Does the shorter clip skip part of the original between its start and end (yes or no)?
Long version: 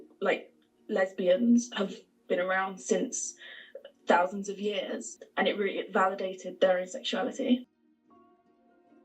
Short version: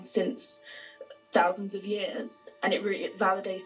no